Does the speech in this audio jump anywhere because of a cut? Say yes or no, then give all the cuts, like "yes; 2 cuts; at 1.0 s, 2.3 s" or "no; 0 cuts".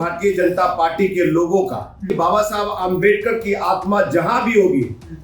yes; 1 cut; at 2.1 s